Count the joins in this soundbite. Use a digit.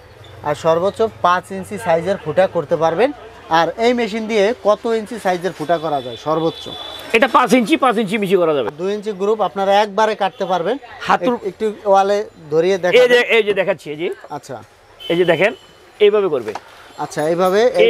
1